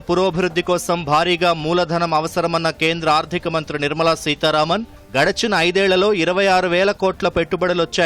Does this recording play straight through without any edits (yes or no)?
yes